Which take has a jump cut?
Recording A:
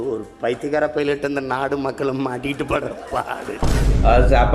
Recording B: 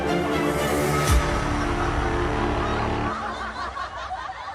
A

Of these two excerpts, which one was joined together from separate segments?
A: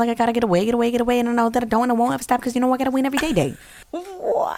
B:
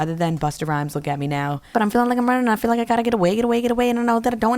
B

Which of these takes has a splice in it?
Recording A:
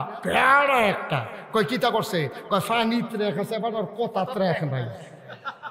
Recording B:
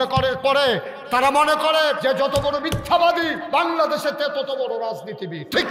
B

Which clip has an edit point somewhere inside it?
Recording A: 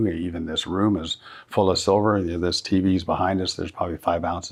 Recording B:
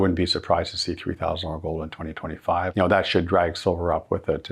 B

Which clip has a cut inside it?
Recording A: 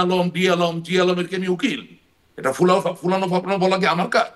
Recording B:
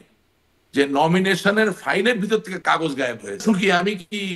B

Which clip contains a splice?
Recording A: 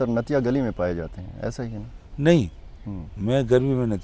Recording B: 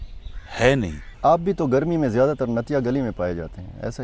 B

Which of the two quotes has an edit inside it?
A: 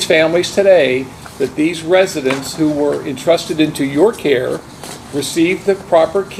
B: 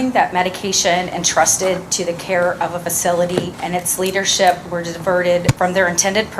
B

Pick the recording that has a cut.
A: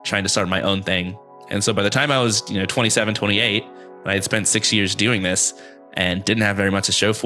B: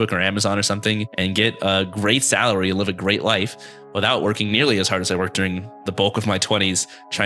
B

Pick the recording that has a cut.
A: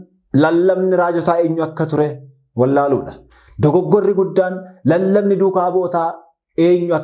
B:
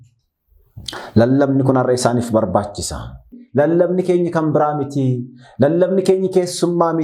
B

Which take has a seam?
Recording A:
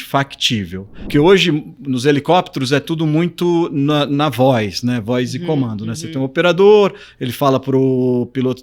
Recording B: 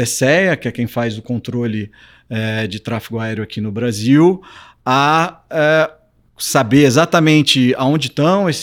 A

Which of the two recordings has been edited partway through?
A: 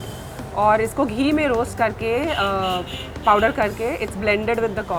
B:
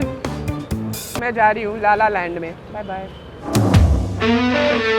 B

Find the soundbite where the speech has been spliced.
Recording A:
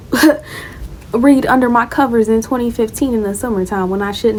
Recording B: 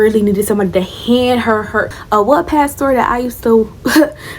B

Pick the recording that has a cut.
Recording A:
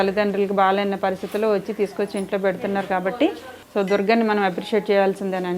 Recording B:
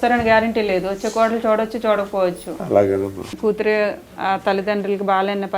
B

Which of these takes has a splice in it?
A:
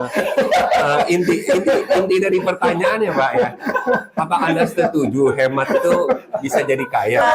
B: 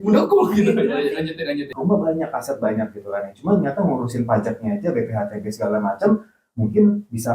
B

